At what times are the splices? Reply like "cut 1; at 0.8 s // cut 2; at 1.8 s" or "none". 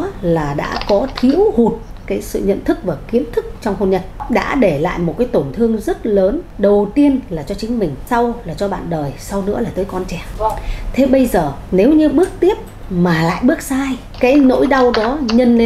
cut 1; at 4.2 s // cut 2; at 6.5 s // cut 3; at 8.0 s // cut 4; at 10.2 s // cut 5; at 11.6 s // cut 6; at 14.0 s